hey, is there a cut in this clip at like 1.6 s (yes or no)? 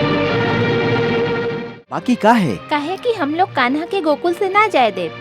yes